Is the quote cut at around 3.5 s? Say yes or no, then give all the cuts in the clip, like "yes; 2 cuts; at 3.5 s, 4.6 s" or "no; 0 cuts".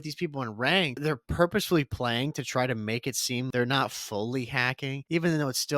yes; 3 cuts; at 1.0 s, 3.5 s, 5.1 s